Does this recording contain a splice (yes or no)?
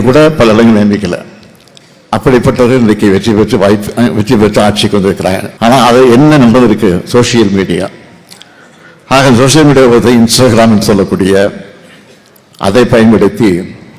yes